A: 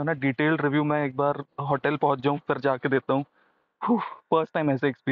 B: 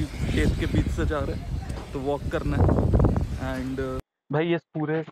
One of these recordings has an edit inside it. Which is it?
B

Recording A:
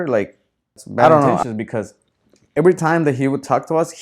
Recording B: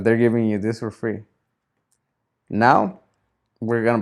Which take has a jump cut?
A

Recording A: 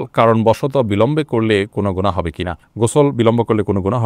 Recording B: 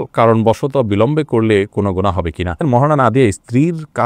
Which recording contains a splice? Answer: B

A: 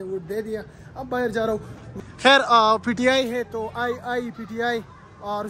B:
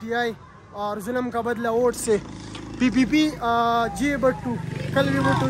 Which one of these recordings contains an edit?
A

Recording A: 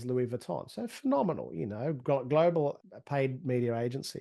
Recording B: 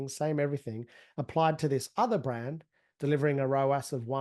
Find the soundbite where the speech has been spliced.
A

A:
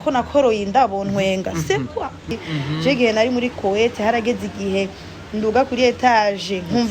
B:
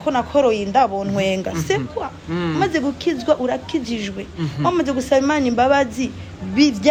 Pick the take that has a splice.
A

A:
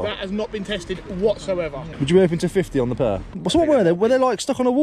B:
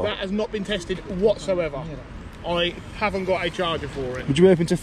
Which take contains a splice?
A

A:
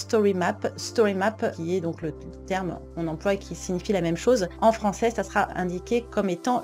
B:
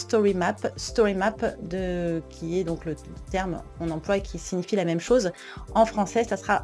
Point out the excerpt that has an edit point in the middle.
A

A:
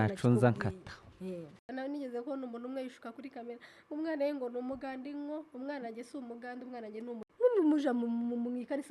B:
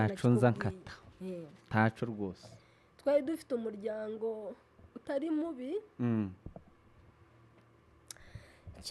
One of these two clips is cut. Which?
A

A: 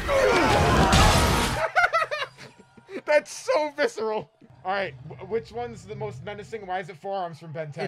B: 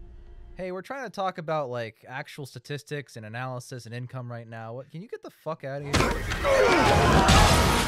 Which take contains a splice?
A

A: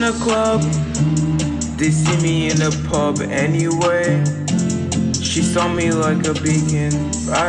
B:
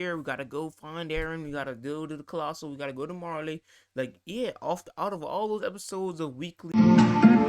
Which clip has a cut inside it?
B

